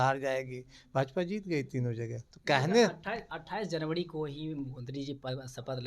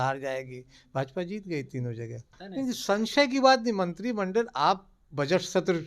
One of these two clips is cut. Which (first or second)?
second